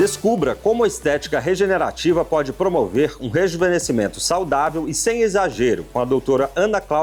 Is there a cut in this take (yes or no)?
no